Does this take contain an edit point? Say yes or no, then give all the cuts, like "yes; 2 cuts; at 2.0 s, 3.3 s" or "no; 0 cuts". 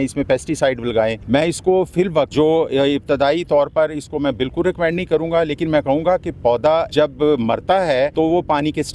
yes; 4 cuts; at 1.2 s, 2.3 s, 6.9 s, 8.1 s